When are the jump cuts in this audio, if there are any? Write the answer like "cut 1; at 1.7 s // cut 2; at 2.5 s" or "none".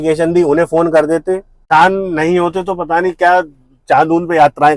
cut 1; at 1.6 s